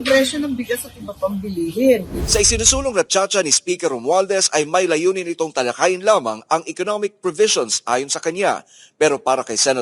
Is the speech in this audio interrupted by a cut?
yes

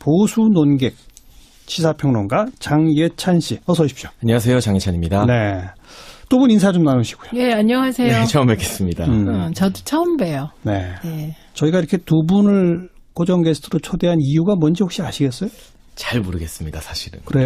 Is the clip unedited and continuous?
yes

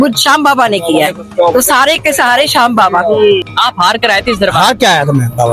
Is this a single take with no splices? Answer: no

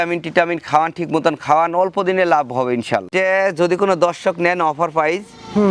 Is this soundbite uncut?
no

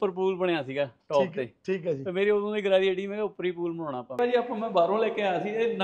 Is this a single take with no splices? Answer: no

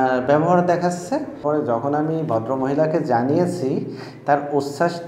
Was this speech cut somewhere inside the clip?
yes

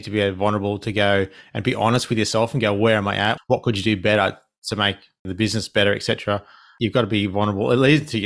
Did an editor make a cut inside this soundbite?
yes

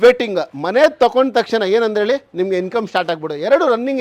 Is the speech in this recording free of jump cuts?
yes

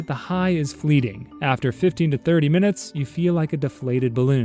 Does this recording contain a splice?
no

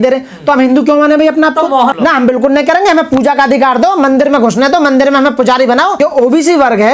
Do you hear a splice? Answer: yes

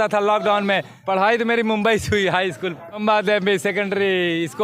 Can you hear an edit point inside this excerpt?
yes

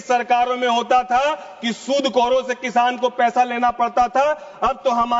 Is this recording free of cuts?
yes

